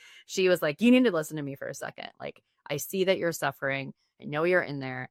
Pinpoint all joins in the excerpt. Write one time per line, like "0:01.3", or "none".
none